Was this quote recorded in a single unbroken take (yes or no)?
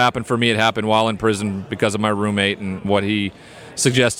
no